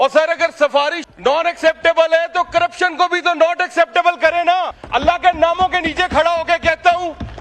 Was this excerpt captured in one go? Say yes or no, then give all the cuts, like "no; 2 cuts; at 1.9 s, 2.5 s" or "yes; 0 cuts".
no; 2 cuts; at 1.0 s, 4.8 s